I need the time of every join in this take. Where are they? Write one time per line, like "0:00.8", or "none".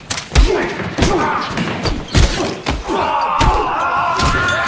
0:03.0